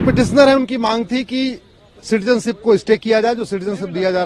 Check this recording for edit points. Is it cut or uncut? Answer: uncut